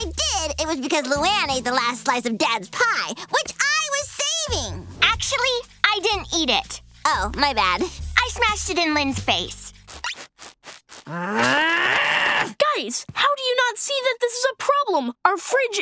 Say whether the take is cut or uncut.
uncut